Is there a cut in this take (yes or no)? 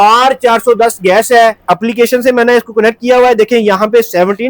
yes